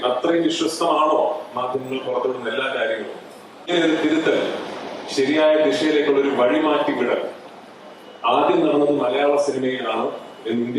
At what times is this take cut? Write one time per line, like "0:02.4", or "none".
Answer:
0:03.7